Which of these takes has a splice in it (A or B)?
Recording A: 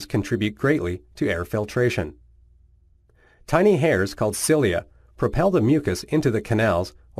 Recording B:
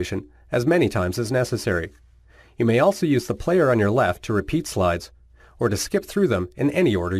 B